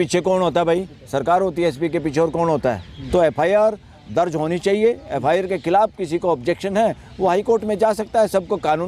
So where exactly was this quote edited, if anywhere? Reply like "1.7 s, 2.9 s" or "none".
2.9 s